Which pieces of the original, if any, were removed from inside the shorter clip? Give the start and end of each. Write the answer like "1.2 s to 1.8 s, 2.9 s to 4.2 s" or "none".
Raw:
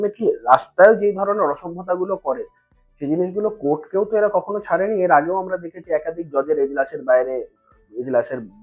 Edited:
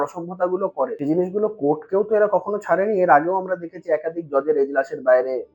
2.4 s to 3.0 s